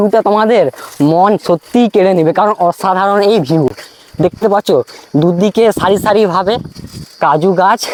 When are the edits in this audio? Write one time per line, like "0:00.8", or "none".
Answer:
none